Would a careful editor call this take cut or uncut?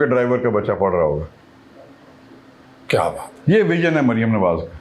uncut